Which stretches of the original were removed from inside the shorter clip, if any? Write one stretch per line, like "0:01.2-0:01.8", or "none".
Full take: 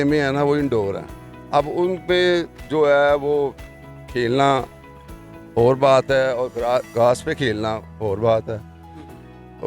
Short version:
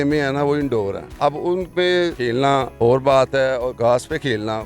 0:01.0-0:01.3
0:02.6-0:05.0
0:06.5-0:06.9

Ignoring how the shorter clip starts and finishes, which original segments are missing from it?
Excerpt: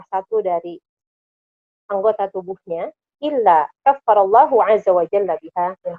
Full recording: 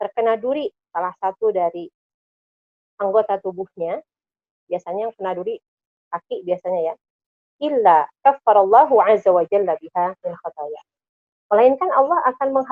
0:04.1-0:07.4

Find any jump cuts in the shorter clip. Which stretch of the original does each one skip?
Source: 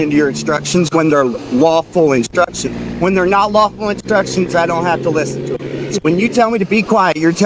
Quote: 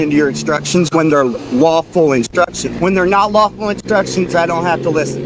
0:02.7-0:02.9

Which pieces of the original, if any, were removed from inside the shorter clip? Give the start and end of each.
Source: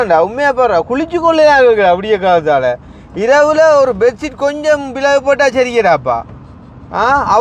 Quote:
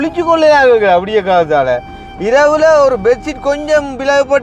none

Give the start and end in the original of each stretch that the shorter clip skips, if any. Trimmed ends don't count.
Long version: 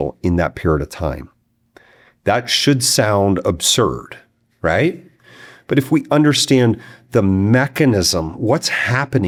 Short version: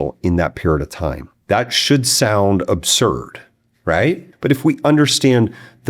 0:01.3-0:02.1
0:05.1-0:05.6

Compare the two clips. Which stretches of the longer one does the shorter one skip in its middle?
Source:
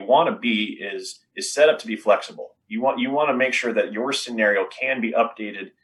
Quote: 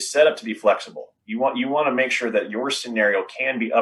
none

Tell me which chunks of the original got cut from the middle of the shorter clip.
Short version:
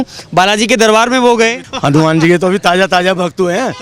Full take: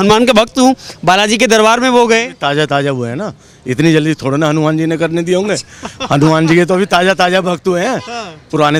0:02.3-0:05.9

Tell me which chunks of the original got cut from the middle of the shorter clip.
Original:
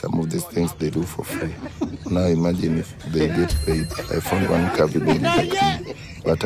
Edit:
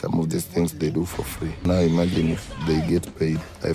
0:01.5-0:02.0

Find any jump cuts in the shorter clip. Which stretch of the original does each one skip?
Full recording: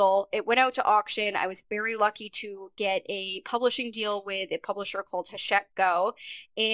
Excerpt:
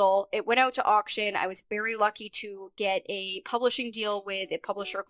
none

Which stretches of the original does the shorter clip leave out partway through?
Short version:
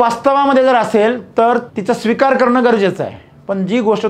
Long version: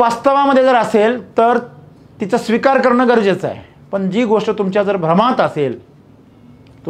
0:01.7-0:02.2

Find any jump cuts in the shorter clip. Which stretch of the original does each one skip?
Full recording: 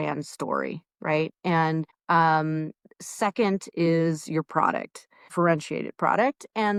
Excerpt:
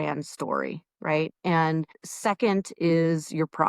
0:01.9-0:02.9

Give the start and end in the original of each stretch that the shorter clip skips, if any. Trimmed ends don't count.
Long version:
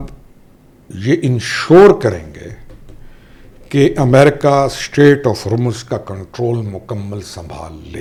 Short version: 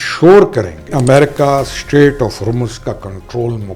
0:02.4-0:04.0

